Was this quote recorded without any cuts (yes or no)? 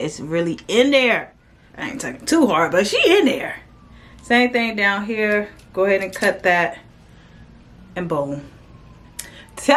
yes